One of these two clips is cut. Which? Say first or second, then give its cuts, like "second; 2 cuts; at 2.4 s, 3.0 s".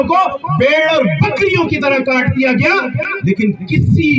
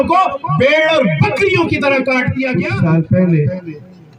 second; 1 cut; at 2.5 s